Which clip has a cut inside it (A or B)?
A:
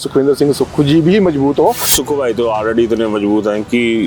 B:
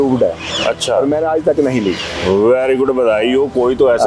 A